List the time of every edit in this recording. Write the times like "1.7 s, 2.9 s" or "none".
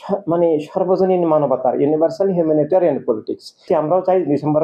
3.6 s